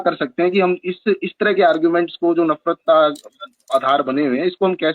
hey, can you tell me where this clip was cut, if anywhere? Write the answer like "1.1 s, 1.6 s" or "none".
none